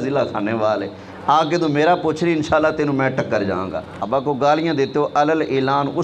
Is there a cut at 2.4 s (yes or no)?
no